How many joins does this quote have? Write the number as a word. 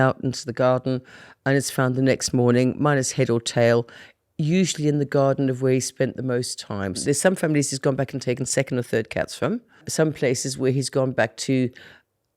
two